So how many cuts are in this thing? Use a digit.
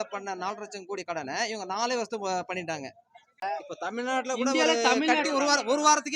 1